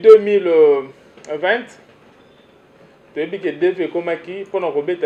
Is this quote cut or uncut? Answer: uncut